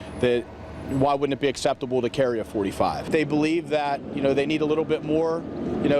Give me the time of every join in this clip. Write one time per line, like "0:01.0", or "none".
0:03.1

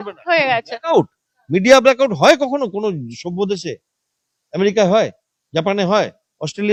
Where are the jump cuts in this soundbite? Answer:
none

